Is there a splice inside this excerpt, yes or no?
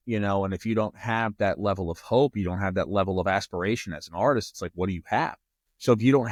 no